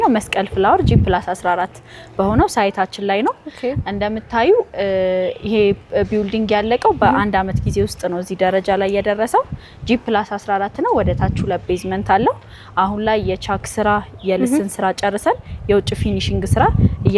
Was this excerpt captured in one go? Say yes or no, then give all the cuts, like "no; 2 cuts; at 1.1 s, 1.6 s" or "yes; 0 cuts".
yes; 0 cuts